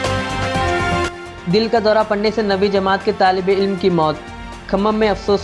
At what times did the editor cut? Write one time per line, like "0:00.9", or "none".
0:01.0